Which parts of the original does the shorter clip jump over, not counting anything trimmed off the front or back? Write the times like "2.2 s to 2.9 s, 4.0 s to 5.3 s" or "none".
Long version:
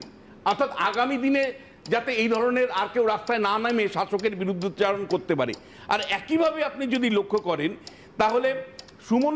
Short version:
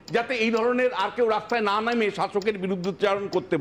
none